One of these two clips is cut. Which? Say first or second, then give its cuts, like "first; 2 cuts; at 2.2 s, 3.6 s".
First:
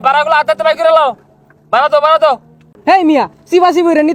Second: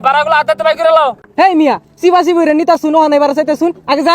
second; 1 cut; at 1.2 s